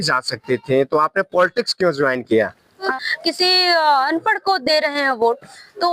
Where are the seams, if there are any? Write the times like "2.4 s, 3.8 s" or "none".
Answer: 2.9 s